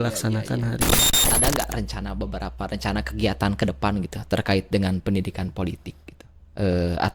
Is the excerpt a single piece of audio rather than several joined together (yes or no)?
no